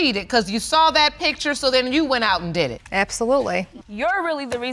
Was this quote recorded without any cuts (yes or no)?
no